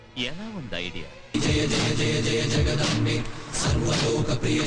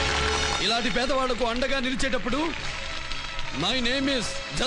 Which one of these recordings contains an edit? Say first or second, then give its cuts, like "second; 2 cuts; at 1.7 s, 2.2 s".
first; 1 cut; at 1.3 s